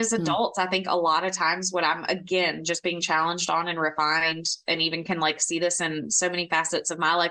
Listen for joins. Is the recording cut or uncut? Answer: uncut